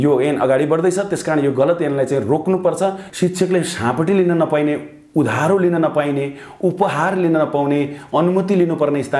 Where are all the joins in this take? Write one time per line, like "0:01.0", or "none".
0:03.0